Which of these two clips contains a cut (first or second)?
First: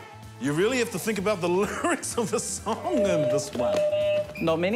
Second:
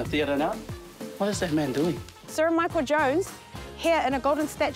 second